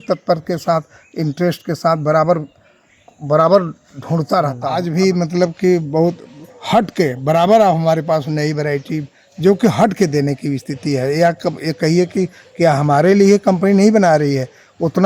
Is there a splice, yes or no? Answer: yes